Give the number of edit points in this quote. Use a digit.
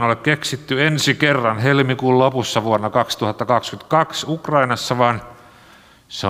0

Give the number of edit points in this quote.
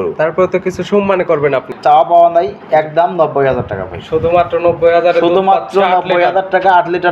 1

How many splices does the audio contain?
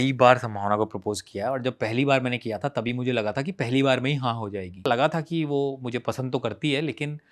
1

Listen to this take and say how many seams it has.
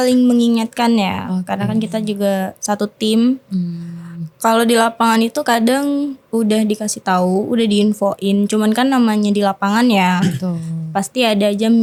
0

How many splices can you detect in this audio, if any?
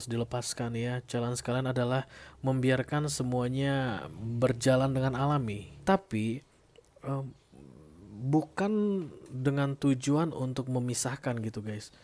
1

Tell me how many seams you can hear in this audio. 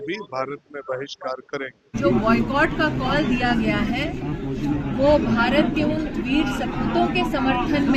1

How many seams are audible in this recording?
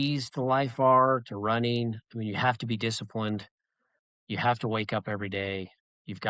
0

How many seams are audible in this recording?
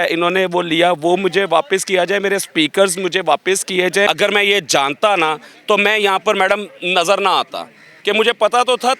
1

